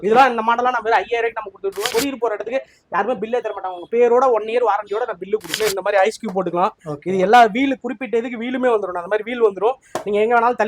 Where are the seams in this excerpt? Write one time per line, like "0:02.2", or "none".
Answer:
0:01.9
0:05.6